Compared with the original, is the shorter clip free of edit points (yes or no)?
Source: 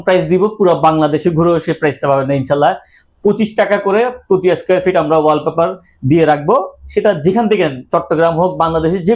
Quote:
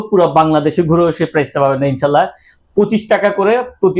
yes